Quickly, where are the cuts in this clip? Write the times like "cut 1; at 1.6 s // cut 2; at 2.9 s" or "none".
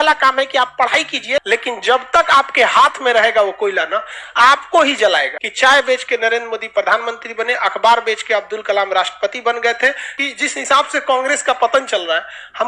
cut 1; at 1.4 s // cut 2; at 5.4 s // cut 3; at 10.2 s